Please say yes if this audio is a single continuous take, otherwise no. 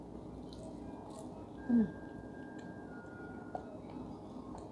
yes